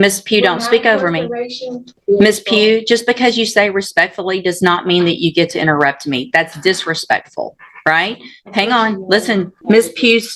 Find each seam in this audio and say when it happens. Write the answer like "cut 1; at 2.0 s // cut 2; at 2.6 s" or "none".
cut 1; at 2.0 s // cut 2; at 9.5 s